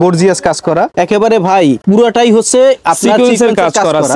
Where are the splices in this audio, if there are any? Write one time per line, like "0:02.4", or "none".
0:00.9
0:01.8